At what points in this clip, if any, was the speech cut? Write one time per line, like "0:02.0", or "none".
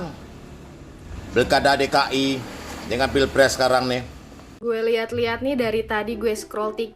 0:04.4